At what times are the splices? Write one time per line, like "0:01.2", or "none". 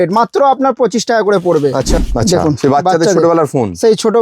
0:01.9